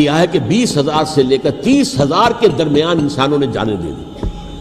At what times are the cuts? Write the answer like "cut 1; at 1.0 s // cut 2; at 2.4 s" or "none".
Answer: none